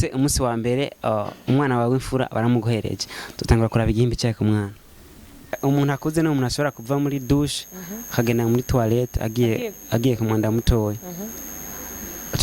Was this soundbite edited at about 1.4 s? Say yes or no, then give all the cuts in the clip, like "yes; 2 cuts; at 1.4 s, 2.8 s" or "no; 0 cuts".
no; 1 cut; at 5.6 s